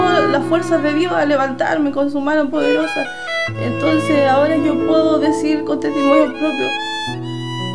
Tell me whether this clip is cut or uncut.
cut